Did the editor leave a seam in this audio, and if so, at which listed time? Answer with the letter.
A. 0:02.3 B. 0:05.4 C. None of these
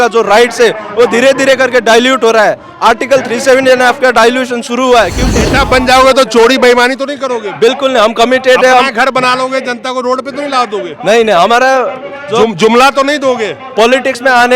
B